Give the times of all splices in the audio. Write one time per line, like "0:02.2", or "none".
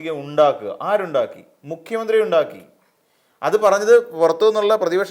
none